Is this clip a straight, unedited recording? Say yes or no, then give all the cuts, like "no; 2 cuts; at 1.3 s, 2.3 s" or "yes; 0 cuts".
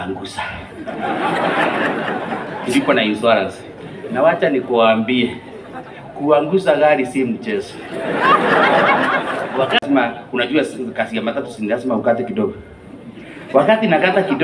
no; 1 cut; at 9.8 s